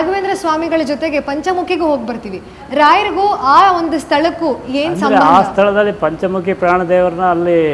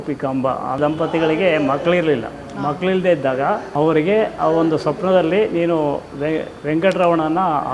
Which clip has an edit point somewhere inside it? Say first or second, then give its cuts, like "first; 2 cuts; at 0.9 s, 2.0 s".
second; 2 cuts; at 0.8 s, 3.7 s